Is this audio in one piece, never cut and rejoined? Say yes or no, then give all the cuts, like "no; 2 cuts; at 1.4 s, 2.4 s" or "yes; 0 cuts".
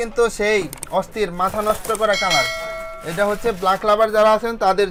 yes; 0 cuts